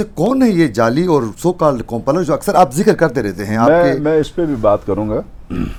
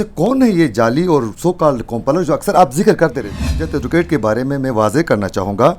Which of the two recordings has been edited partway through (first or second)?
second